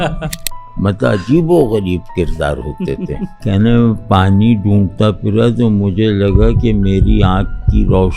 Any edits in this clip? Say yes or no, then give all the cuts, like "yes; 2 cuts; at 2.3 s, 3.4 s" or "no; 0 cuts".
yes; 1 cut; at 3.4 s